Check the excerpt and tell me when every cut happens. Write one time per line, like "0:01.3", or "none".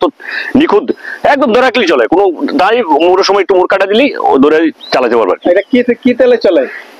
none